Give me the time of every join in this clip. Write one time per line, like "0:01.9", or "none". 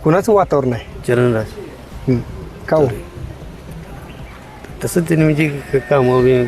0:00.9